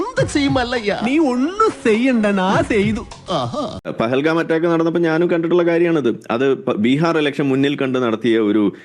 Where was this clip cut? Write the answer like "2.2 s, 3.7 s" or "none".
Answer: 3.8 s